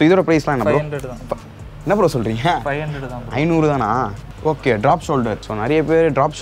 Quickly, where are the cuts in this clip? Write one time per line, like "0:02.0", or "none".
0:04.2
0:05.5